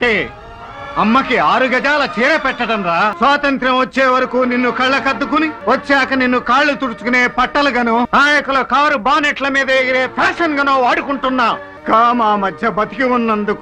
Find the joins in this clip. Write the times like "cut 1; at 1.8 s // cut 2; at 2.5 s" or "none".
cut 1; at 3.1 s // cut 2; at 5.6 s // cut 3; at 8.1 s // cut 4; at 11.7 s